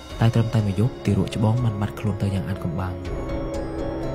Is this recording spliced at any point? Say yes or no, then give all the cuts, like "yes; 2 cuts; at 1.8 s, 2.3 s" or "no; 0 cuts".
no; 0 cuts